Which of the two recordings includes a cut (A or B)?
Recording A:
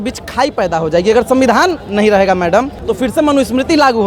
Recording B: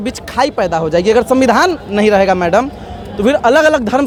A